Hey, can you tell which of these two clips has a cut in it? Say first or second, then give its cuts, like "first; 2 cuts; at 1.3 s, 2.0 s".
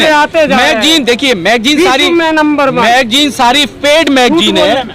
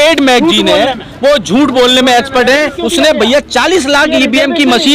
second; 1 cut; at 2.8 s